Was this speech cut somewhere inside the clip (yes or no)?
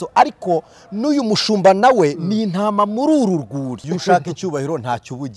yes